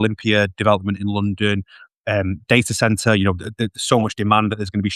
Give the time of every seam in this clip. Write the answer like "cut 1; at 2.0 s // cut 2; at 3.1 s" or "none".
none